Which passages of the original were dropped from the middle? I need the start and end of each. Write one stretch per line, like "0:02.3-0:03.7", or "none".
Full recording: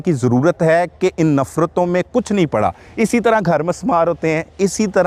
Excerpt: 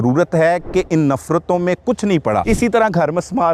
0:02.7-0:03.0